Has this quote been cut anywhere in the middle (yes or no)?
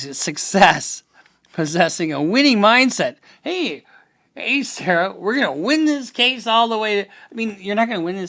no